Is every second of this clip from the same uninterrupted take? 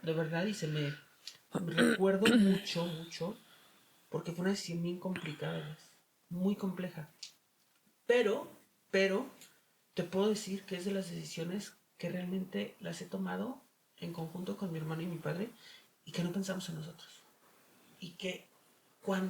yes; 0 cuts

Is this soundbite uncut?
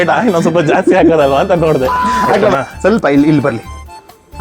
no; 1 cut; at 2.5 s

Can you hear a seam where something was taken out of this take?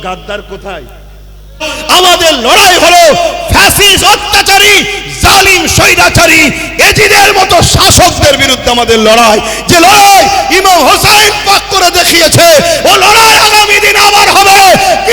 yes; 1 cut; at 1.7 s

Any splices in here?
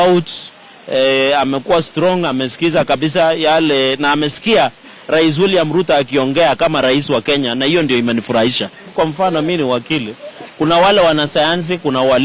yes; 1 cut; at 8.9 s

